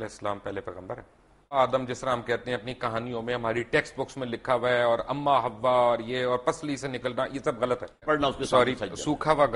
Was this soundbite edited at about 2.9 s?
no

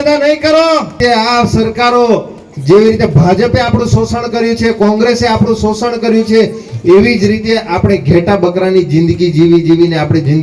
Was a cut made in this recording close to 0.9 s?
yes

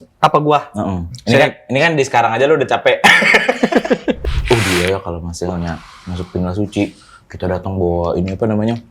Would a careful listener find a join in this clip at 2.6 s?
no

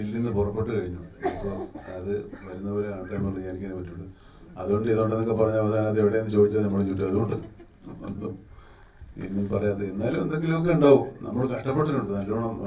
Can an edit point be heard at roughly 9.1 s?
no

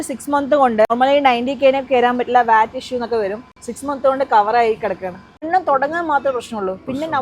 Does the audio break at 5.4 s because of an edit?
yes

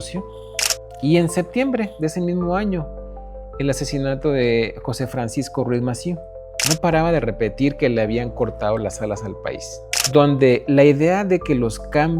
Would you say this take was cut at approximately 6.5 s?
yes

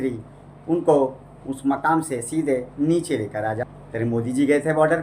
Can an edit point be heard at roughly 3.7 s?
yes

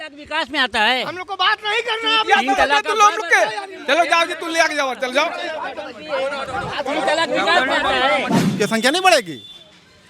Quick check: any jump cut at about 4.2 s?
no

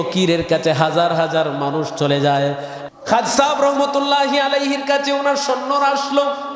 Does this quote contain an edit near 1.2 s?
no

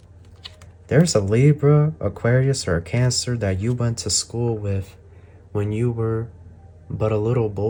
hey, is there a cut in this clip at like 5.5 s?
no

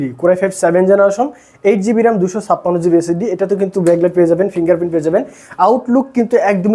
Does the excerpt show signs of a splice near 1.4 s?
no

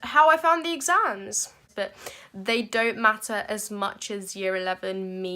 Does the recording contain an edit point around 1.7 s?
yes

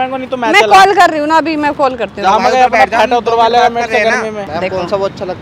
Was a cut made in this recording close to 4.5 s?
yes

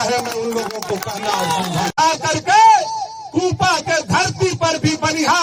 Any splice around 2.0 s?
yes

